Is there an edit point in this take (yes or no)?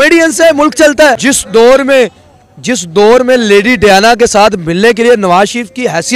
yes